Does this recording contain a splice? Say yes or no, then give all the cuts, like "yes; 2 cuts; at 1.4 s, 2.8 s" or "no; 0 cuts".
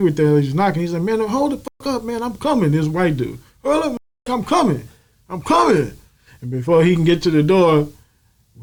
no; 0 cuts